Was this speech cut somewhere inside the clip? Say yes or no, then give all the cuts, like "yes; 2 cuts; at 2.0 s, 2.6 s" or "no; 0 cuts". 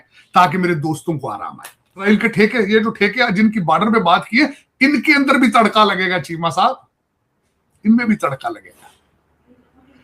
yes; 1 cut; at 2.1 s